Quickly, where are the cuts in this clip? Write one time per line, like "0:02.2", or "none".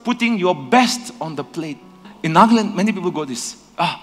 0:02.1